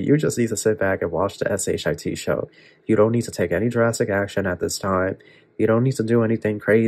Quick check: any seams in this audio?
no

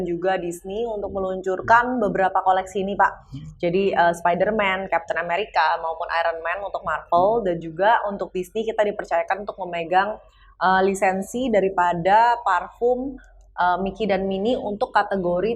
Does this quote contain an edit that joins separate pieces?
no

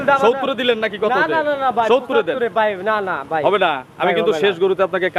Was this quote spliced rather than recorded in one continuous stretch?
no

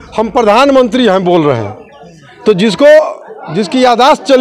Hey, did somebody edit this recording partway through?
no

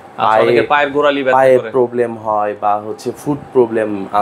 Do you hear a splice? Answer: no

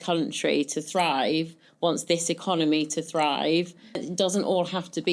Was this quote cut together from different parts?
yes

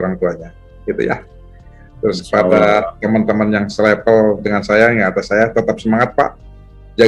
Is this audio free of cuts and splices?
yes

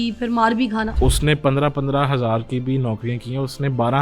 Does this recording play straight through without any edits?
no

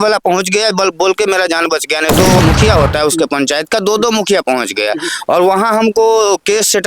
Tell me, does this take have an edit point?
yes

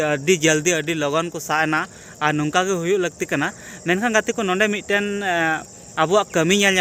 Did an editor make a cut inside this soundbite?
no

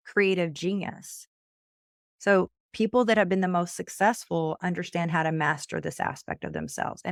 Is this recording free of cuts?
yes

